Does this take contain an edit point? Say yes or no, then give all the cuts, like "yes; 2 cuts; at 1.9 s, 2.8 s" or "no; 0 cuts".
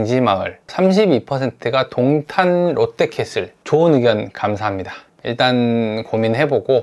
no; 0 cuts